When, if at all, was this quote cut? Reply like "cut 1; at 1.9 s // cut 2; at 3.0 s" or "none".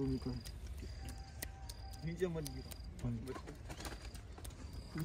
none